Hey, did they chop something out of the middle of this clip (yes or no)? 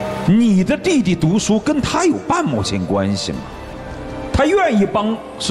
no